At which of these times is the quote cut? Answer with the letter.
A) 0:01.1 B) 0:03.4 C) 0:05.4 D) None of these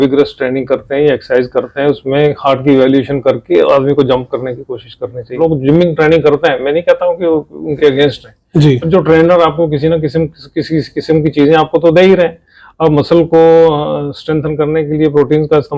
C